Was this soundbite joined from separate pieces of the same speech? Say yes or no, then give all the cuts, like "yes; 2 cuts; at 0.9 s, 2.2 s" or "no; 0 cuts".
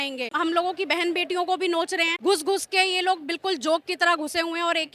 yes; 1 cut; at 2.1 s